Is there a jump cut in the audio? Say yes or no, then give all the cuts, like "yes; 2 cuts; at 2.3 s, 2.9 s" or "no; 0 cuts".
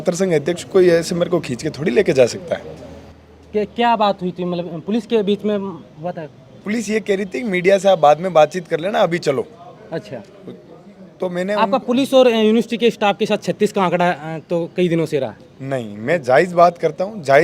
no; 0 cuts